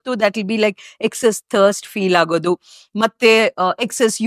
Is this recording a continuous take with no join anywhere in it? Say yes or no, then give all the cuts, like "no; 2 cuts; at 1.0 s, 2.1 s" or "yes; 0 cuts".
yes; 0 cuts